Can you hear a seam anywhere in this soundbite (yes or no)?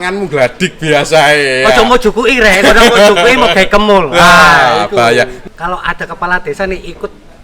yes